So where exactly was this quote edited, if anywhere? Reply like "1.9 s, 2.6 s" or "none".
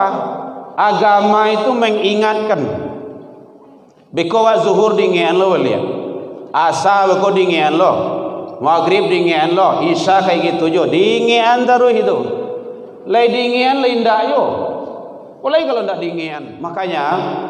16.4 s